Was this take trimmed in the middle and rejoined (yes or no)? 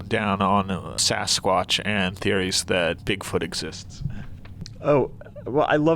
yes